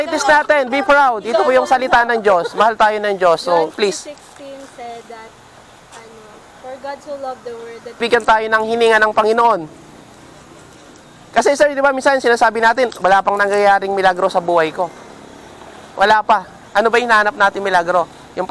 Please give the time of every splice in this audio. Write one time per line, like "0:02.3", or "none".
0:08.0